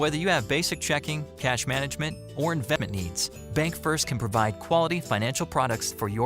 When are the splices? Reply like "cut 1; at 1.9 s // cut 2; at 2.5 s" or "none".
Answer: cut 1; at 2.8 s